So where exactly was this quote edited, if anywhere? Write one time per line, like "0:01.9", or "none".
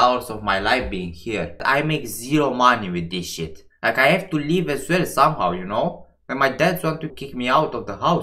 0:07.1